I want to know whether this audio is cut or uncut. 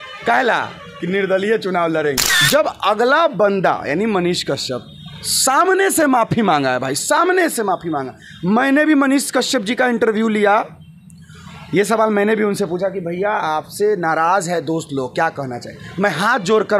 cut